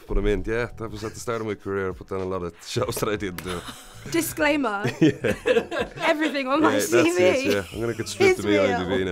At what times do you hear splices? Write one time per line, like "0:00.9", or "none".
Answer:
0:04.1